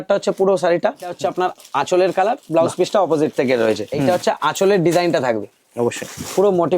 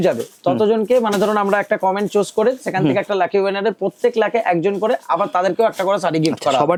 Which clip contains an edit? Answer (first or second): first